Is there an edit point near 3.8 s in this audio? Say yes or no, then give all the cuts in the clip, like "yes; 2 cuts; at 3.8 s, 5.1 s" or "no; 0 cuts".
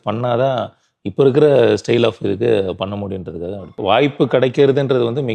yes; 1 cut; at 3.8 s